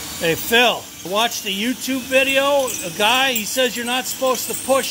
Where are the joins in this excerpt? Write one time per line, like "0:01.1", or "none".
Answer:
0:00.9

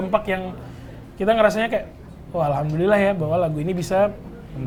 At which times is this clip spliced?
none

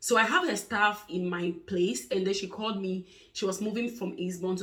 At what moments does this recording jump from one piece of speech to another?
none

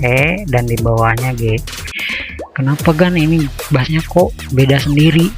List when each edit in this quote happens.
0:01.9

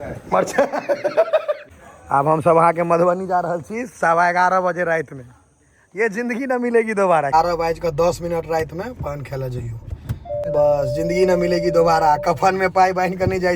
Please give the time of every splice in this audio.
0:01.6
0:07.3
0:10.5

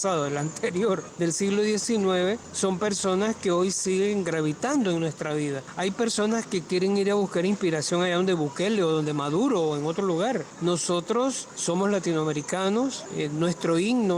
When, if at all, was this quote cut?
0:01.1
0:02.5
0:05.7
0:10.5
0:11.5
0:13.0

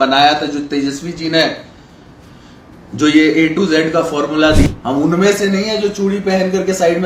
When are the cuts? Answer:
0:04.7

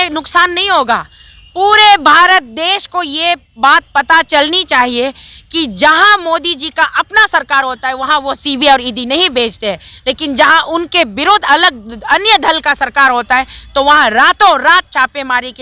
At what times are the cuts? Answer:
none

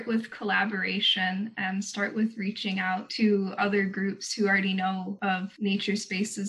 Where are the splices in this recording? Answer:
0:03.1
0:05.3

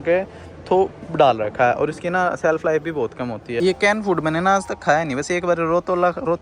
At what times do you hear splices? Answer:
0:03.6

